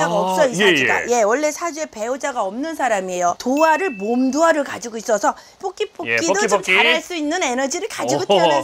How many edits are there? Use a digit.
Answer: 2